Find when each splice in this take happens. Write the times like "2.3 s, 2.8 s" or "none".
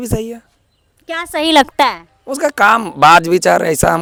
none